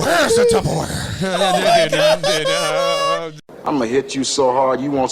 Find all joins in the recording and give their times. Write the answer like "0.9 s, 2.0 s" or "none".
3.5 s